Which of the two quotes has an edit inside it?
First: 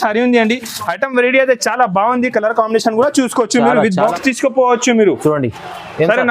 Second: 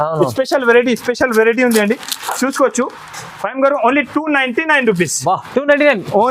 first; 1 cut; at 4.2 s

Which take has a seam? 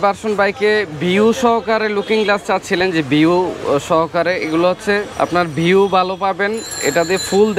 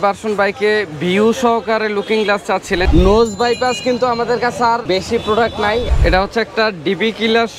second; 3 cuts; at 2.9 s, 4.8 s, 5.9 s

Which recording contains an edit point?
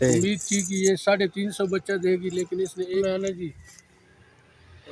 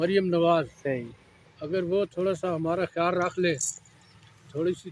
first; 1 cut; at 3.0 s

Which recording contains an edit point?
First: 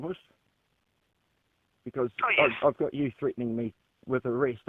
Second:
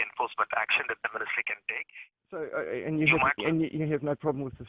second; 1 cut; at 2.4 s

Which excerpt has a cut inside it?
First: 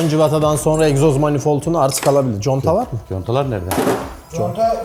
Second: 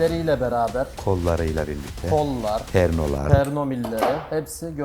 second; 1 cut; at 2.7 s

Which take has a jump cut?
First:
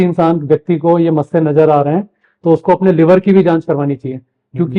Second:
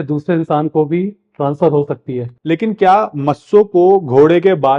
second; 1 cut; at 2.2 s

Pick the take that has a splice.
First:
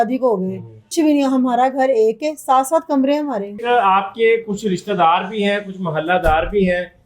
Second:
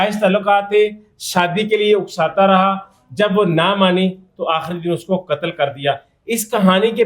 first; 1 cut; at 3.6 s

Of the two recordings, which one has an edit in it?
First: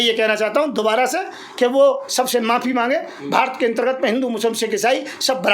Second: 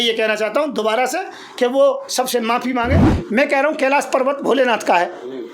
second; 1 cut; at 3.1 s

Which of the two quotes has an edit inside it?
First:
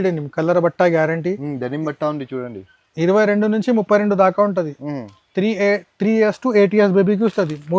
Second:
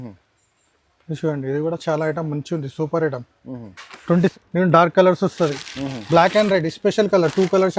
second; 1 cut; at 4.3 s

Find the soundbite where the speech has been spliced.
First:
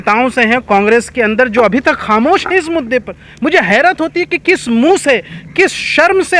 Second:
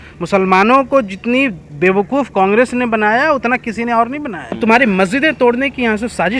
second; 1 cut; at 4.5 s

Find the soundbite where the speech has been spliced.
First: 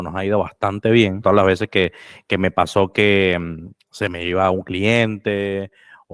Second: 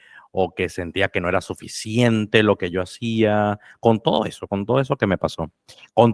first; 1 cut; at 1.2 s

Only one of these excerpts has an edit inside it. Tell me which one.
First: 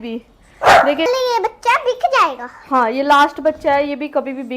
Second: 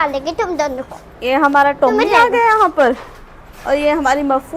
first; 1 cut; at 1.1 s

